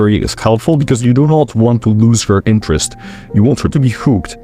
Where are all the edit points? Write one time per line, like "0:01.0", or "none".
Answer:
none